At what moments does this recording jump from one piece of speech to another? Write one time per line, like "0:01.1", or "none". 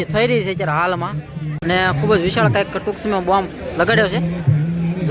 0:01.6